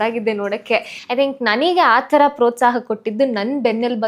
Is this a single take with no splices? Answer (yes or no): no